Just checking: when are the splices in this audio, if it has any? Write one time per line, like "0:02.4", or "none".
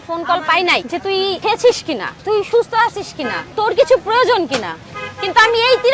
0:01.1